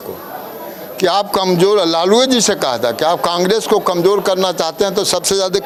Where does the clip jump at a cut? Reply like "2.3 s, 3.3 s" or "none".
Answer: none

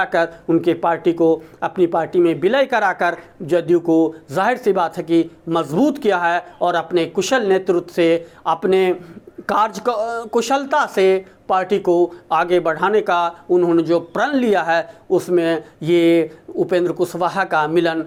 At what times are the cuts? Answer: none

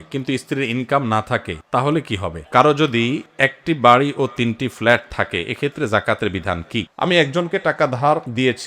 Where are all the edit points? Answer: 2.3 s, 6.9 s

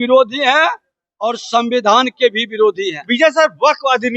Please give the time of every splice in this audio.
none

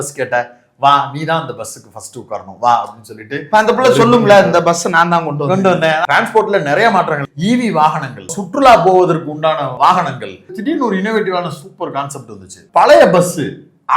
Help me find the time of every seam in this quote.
6.0 s, 7.3 s, 8.4 s, 9.7 s, 10.5 s, 12.6 s

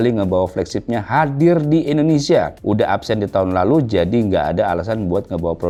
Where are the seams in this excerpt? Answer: none

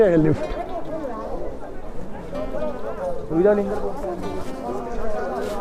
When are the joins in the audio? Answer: none

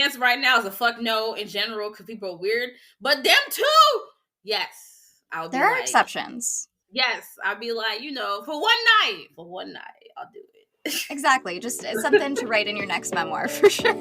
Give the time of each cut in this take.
none

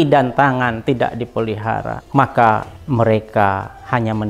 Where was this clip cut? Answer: 2.0 s, 2.8 s

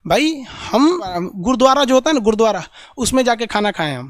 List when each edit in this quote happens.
1.2 s

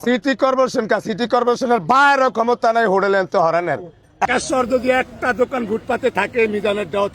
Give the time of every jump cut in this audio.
4.3 s

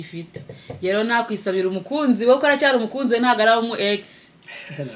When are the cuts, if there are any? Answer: none

